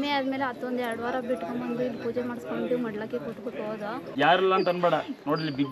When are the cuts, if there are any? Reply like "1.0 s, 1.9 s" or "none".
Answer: 4.0 s